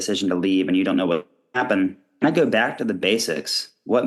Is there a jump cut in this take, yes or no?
yes